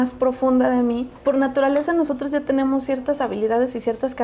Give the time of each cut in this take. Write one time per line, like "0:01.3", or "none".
0:01.1